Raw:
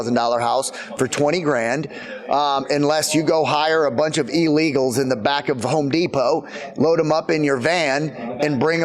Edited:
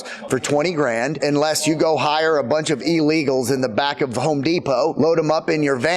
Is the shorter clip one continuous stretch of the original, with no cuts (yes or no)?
no